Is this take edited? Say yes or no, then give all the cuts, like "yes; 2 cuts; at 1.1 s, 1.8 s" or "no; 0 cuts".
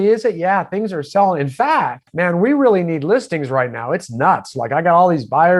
yes; 1 cut; at 2.0 s